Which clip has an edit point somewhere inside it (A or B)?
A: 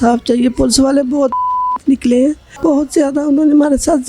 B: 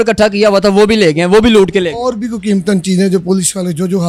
A